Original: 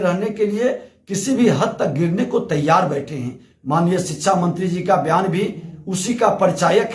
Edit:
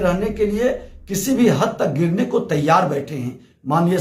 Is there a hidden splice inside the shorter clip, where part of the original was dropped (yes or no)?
no